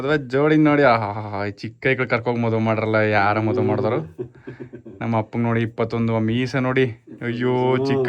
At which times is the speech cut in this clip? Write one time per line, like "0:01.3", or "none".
none